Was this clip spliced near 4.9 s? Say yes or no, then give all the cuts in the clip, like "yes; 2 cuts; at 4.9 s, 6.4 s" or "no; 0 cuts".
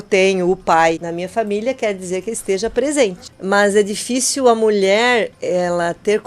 no; 2 cuts; at 1.1 s, 3.3 s